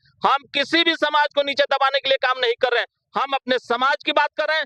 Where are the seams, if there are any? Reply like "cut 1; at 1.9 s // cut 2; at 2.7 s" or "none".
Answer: none